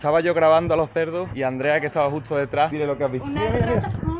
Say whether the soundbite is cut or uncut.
cut